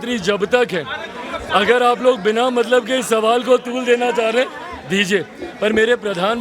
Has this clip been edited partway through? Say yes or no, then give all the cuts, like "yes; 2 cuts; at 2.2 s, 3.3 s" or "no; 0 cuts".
no; 0 cuts